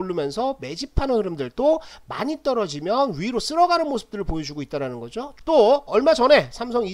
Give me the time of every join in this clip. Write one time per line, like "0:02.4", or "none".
0:05.3